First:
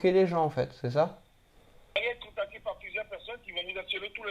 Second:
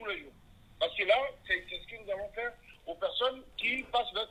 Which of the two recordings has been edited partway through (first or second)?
first